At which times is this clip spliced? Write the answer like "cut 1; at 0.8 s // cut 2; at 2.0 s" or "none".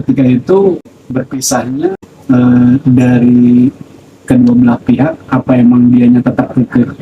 cut 1; at 0.9 s // cut 2; at 2.1 s